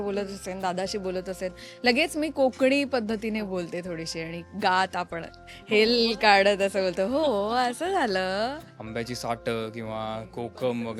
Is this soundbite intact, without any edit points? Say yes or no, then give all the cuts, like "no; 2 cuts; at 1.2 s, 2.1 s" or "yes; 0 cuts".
no; 1 cut; at 8.7 s